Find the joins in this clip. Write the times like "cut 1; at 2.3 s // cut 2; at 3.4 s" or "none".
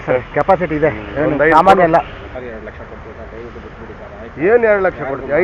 cut 1; at 2.4 s